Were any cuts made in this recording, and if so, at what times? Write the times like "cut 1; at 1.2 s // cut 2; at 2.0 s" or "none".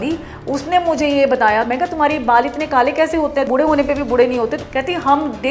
cut 1; at 1.7 s // cut 2; at 3.5 s // cut 3; at 4.6 s